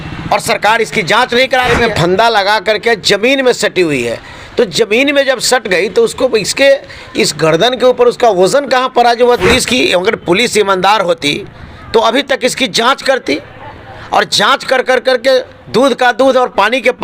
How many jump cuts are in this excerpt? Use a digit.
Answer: 2